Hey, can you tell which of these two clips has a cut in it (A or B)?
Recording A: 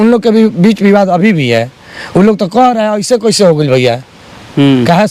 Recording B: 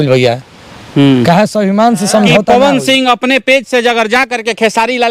B